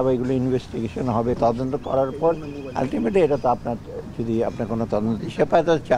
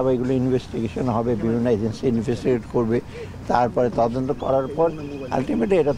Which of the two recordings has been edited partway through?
first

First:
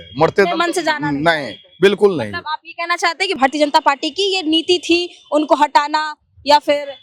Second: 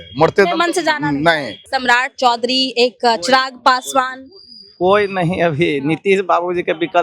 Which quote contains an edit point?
second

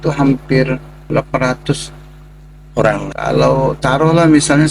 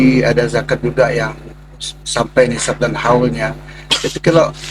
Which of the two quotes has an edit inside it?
first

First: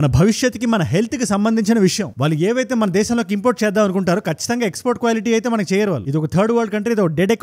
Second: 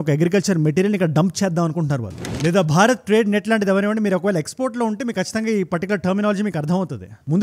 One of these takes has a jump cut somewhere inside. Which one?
second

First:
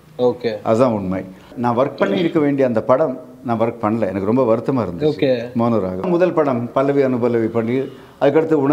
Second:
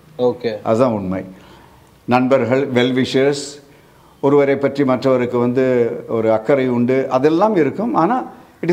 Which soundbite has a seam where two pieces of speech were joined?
first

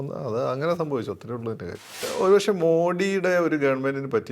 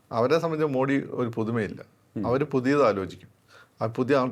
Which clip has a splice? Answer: first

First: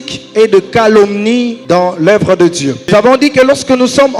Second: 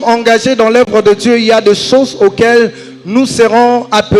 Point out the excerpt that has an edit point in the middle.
first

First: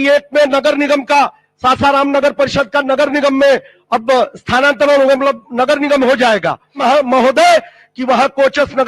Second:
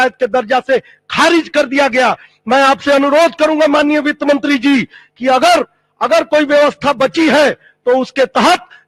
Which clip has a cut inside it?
first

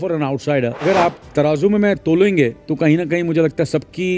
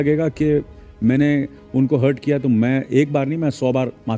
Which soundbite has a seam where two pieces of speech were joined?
first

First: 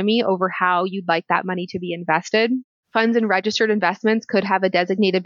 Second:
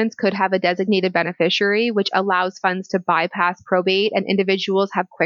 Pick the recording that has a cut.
first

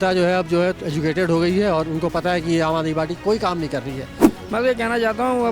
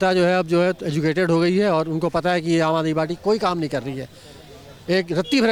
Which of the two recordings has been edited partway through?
first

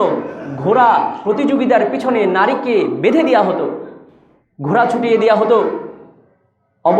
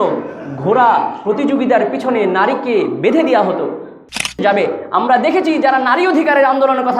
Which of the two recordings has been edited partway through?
second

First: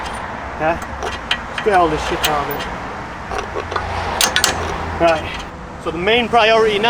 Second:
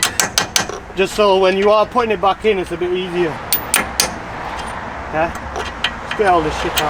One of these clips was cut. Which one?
first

